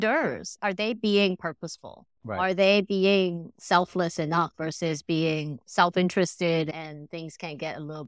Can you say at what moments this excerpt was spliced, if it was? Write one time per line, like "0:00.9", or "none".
0:05.6